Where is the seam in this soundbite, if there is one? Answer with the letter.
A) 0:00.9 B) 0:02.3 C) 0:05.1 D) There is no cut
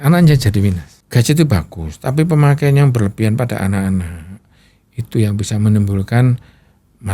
A